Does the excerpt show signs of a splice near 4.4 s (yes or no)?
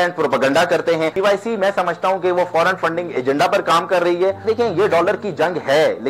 yes